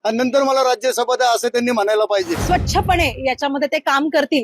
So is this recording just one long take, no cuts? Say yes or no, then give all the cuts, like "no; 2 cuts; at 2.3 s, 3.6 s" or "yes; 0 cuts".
no; 1 cut; at 2.4 s